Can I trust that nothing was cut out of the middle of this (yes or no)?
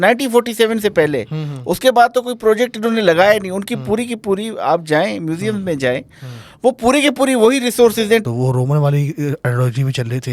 no